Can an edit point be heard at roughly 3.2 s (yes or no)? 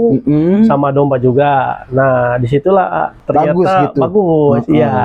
yes